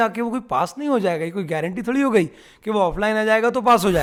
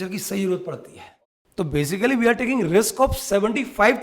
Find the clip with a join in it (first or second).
second